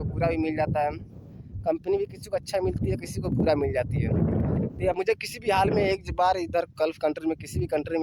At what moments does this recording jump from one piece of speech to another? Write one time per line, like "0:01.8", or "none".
0:05.0